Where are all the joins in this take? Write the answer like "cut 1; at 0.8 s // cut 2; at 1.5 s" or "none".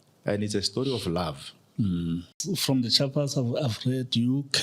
cut 1; at 2.3 s